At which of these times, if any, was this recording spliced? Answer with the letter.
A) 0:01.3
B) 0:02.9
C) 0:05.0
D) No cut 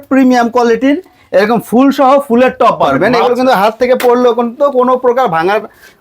B